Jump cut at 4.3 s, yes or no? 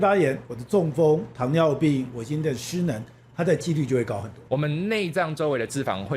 yes